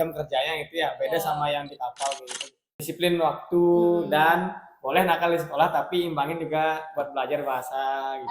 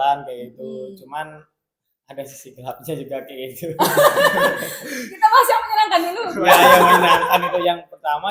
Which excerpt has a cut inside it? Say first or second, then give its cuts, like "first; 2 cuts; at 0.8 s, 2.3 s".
first; 1 cut; at 2.8 s